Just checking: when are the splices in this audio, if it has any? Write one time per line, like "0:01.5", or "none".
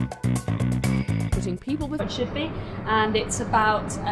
none